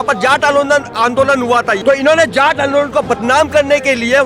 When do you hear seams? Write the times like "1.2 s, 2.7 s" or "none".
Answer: 1.8 s